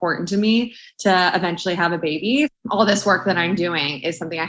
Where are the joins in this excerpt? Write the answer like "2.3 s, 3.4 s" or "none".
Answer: 2.5 s

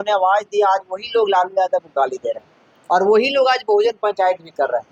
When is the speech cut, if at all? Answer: none

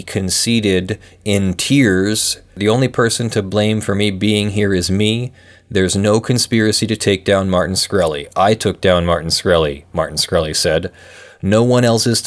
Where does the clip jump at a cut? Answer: 2.5 s

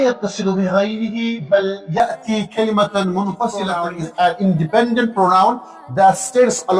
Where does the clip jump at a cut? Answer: 3.8 s

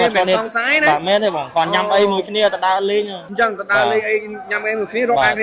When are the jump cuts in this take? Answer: 3.2 s

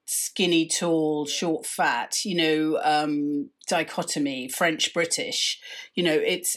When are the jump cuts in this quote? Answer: none

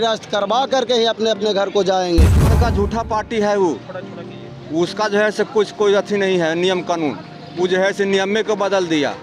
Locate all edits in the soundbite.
2.5 s

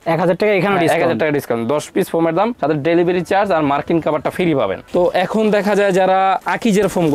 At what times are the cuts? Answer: none

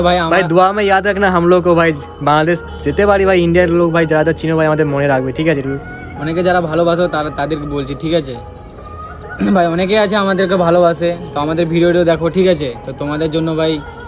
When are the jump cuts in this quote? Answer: none

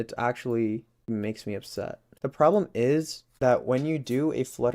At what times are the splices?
1.1 s

